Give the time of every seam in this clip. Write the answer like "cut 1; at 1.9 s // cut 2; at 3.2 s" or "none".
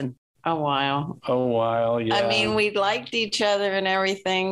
none